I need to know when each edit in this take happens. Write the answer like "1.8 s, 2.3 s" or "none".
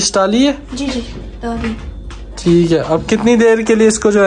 none